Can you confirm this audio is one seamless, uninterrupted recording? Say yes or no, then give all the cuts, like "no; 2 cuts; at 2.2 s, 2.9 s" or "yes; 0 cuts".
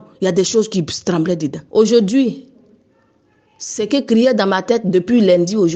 no; 1 cut; at 1.6 s